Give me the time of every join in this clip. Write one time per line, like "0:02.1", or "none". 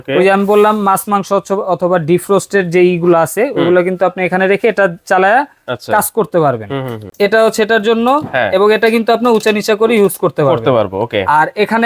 0:07.1

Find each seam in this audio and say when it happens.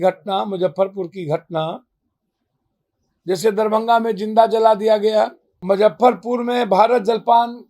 0:05.5

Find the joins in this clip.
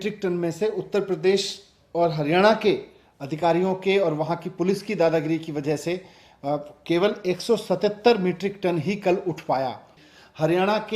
0:10.0

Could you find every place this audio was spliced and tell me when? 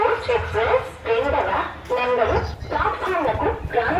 none

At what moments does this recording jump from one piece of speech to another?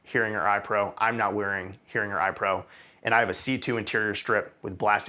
none

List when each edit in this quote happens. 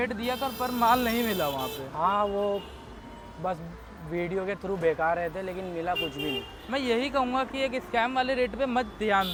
none

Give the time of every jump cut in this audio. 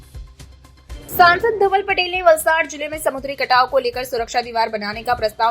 0:01.0

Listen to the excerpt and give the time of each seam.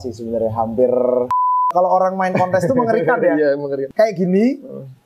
0:01.7
0:03.9

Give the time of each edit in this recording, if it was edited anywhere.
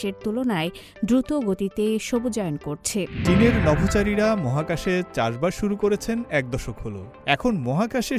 0:03.2

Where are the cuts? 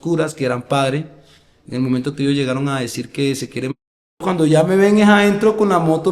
0:04.2

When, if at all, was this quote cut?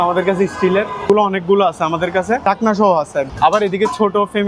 0:01.1
0:02.4
0:03.3

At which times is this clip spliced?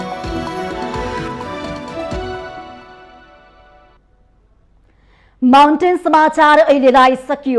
none

